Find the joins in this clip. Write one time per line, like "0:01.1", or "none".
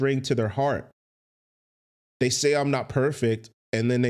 none